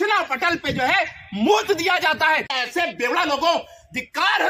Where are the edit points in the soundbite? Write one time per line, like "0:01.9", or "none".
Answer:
0:02.5